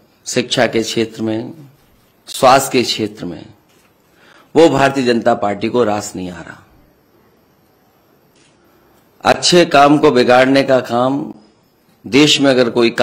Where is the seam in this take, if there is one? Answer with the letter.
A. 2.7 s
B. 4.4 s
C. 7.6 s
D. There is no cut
D